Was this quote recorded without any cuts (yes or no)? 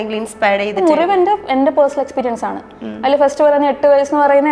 yes